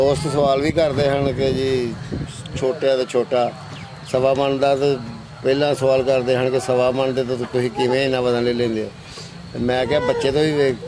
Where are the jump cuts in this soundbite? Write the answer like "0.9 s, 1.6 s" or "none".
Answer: none

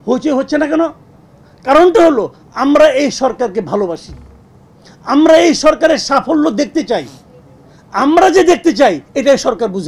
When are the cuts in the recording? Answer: none

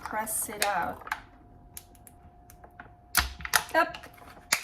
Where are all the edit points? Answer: 2.2 s

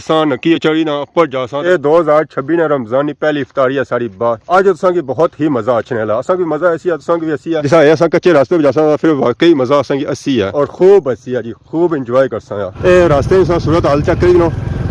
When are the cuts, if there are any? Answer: 1.6 s, 4.4 s, 12.8 s

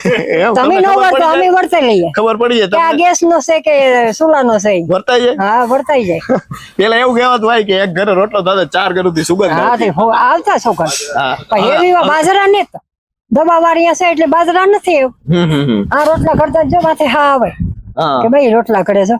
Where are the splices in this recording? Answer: none

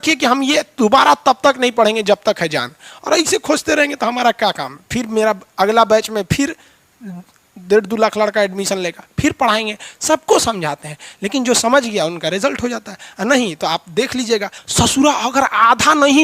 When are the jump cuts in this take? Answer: 14.6 s

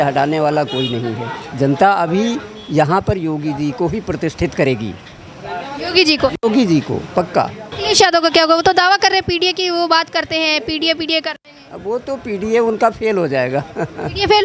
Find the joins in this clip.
1.4 s, 7.7 s

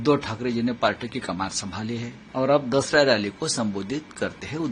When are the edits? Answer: 2.2 s

